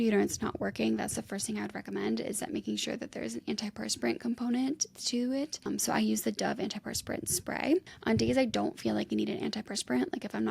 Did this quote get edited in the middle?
no; 0 cuts

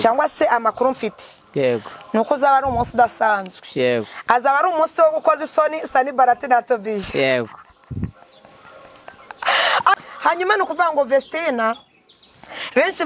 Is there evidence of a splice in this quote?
yes; 1 cut; at 9.9 s

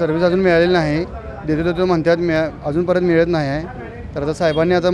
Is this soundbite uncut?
yes; 0 cuts

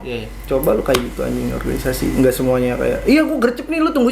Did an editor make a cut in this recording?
no; 0 cuts

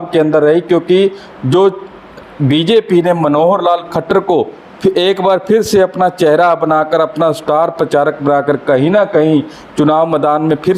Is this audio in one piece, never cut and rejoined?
yes; 0 cuts

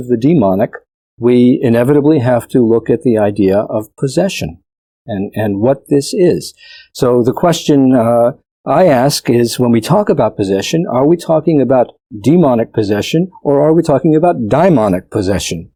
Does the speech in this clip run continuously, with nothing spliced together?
yes; 0 cuts

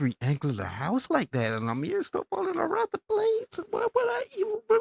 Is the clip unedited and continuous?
yes; 0 cuts

